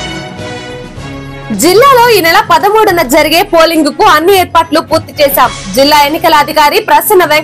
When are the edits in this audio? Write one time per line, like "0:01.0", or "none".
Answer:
none